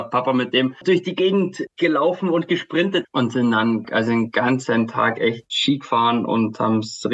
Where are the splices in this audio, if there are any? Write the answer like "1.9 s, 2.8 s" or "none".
3.0 s